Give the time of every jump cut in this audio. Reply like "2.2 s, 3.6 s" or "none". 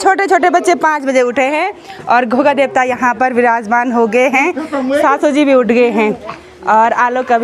none